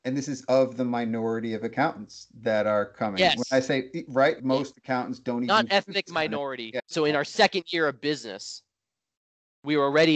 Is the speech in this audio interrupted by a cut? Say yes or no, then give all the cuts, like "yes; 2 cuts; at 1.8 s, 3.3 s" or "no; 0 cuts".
yes; 2 cuts; at 4.4 s, 6.8 s